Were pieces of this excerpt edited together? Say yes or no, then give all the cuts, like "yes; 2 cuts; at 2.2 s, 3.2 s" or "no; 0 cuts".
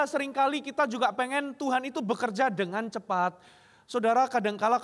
no; 0 cuts